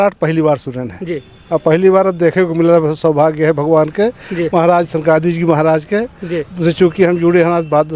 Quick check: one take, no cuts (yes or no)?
yes